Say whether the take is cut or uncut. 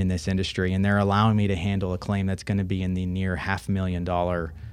uncut